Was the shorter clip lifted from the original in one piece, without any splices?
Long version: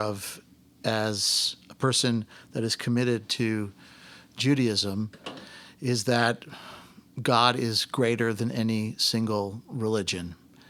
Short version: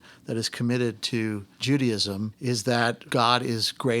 no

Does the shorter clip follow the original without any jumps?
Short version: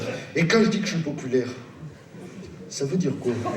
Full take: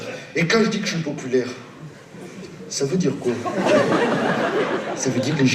yes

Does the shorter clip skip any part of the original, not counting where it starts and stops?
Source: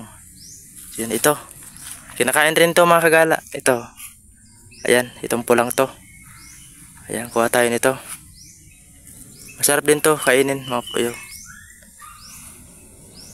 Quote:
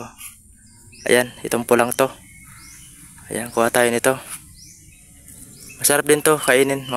no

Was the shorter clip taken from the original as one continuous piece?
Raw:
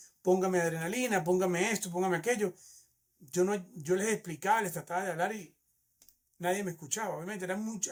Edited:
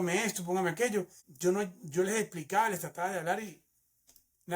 no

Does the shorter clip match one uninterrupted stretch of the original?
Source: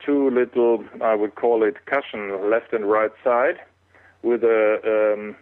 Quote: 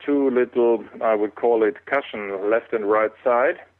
yes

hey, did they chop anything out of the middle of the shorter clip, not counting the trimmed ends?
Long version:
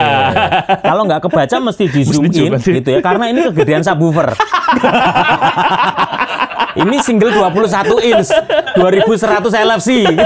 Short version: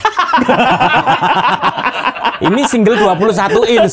no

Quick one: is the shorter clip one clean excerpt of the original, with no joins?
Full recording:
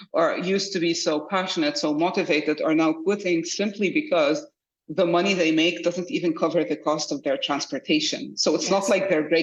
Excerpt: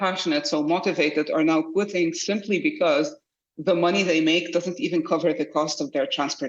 yes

